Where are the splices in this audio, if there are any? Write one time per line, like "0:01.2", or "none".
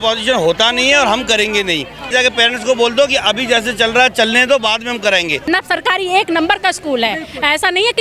0:02.1
0:05.5

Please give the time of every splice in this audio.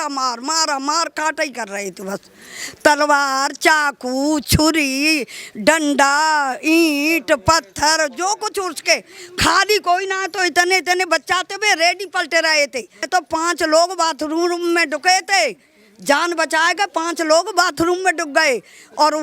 0:13.0

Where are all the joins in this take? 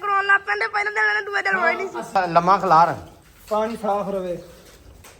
0:02.1

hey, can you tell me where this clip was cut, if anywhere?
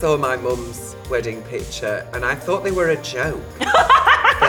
none

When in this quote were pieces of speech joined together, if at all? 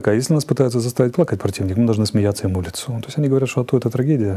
none

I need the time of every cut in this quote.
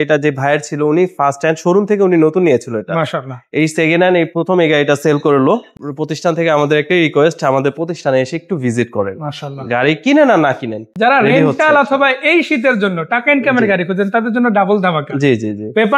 0:05.8
0:10.8

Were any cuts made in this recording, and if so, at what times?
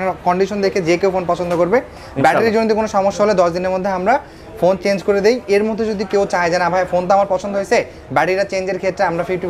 none

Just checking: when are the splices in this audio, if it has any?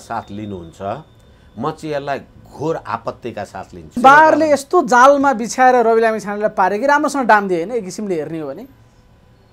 0:04.0

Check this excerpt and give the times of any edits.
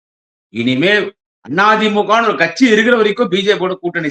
none

